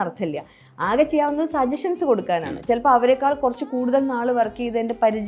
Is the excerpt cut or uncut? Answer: uncut